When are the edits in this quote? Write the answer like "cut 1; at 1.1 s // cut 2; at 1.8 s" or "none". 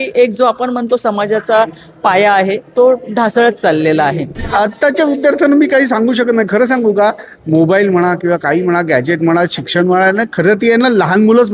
cut 1; at 2.6 s // cut 2; at 4.4 s